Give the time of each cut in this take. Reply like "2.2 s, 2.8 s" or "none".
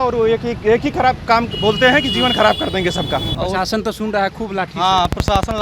3.3 s